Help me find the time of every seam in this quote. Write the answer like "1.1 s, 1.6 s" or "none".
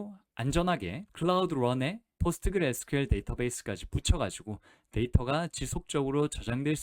1.0 s